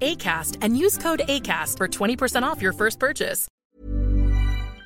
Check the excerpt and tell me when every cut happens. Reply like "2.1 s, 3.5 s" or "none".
3.4 s